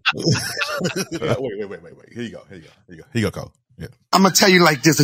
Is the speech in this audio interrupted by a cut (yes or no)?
yes